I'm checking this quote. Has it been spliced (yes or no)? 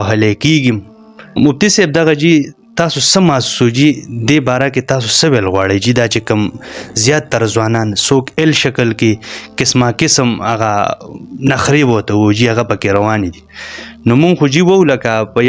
yes